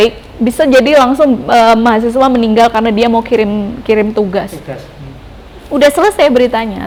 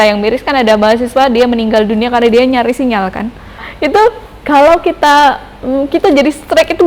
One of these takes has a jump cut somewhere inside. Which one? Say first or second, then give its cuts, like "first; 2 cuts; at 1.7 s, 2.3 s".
second; 1 cut; at 3.7 s